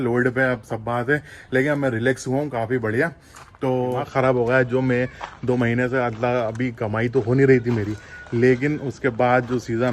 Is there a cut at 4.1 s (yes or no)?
yes